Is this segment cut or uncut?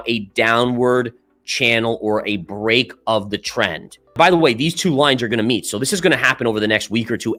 uncut